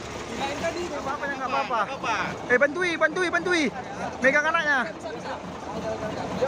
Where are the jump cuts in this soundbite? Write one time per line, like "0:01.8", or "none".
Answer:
0:01.2